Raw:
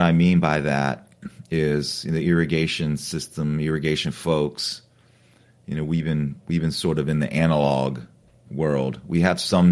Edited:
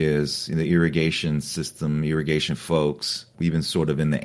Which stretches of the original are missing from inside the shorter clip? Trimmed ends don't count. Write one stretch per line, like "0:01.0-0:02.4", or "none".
0:04.8-0:06.4